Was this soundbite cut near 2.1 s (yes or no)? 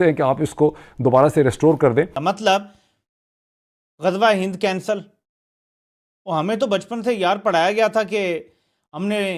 yes